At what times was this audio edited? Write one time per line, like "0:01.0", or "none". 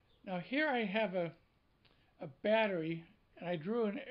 0:02.7